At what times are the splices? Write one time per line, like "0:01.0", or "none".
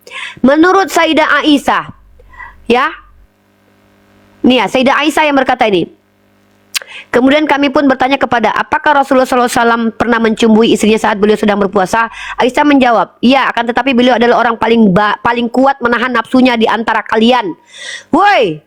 none